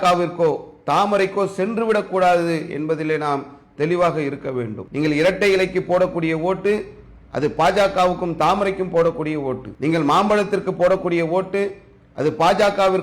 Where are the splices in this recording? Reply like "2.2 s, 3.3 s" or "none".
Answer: 4.8 s, 9.7 s